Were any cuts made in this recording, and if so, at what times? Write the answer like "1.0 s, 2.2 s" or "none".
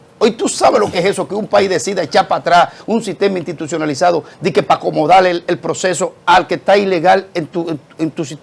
none